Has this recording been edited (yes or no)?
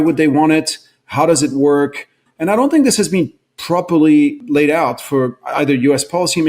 yes